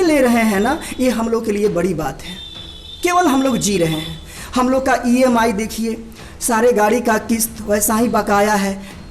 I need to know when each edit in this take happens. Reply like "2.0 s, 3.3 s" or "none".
none